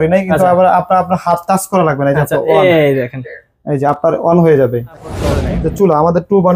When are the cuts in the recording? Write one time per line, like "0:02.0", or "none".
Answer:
0:05.3